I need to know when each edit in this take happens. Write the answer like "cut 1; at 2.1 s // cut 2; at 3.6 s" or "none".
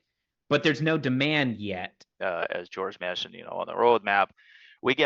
cut 1; at 2.0 s